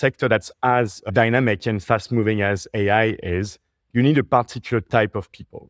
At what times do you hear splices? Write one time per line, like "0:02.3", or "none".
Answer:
0:01.1